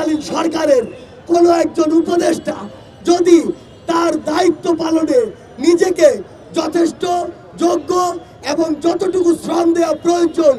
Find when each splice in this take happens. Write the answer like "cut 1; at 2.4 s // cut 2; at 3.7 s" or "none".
none